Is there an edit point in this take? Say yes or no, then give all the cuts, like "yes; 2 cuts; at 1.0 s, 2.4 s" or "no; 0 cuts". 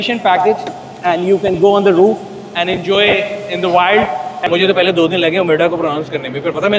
yes; 1 cut; at 4.4 s